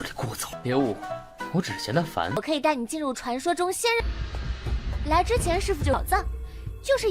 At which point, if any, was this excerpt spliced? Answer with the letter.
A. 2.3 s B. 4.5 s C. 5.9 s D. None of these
A